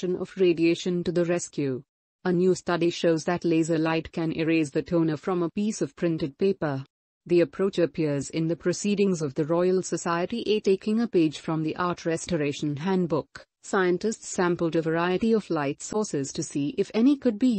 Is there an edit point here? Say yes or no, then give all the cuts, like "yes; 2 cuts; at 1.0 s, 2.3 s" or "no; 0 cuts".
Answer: no; 0 cuts